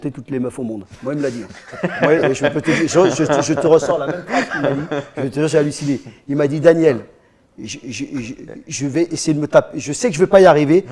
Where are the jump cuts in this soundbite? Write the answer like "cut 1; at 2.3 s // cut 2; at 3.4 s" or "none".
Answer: none